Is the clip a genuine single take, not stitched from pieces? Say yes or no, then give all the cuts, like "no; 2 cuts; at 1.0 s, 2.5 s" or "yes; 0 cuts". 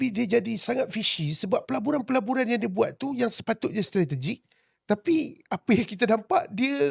yes; 0 cuts